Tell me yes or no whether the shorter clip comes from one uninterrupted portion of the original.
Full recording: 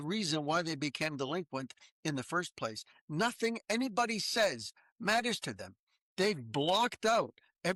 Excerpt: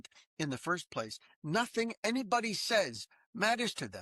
yes